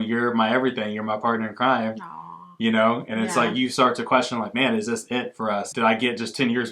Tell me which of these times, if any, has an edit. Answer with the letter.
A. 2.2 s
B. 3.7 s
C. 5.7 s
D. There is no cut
C